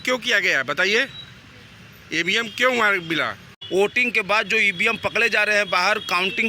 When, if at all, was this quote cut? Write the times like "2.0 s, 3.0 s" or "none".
3.6 s